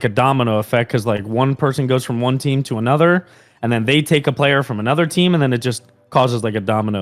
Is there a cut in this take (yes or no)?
no